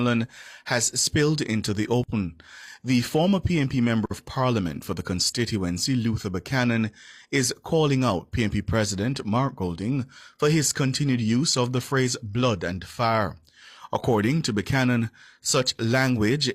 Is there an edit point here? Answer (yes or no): no